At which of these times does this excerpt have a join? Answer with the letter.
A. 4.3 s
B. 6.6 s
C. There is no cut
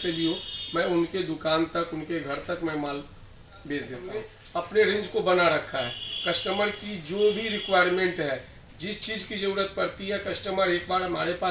A